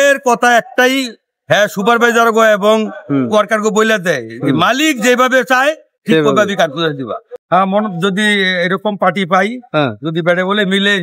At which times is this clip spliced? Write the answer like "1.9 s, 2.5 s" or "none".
7.3 s